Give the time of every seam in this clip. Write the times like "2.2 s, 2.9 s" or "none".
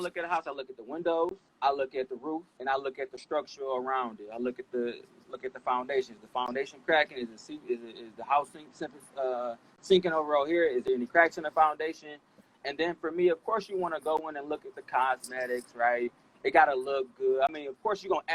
1.4 s, 2.5 s